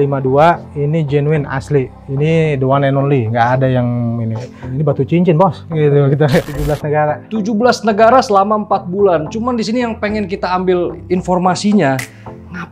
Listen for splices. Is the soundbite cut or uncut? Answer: cut